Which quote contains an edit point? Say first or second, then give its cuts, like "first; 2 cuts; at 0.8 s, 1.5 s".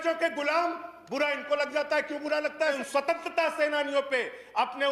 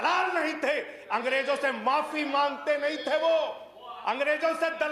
first; 1 cut; at 2.8 s